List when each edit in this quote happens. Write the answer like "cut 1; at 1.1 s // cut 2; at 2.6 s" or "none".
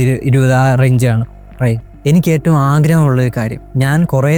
none